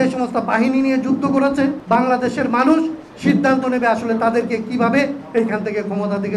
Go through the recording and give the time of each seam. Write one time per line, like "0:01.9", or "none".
0:01.8